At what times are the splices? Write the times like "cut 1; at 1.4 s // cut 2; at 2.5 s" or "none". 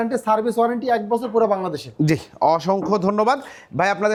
none